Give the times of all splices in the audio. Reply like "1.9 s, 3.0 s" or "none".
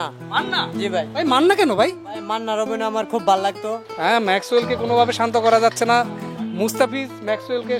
3.8 s